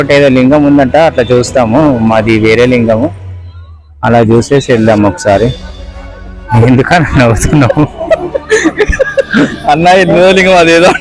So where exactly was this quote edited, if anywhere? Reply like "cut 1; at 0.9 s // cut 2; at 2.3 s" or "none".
none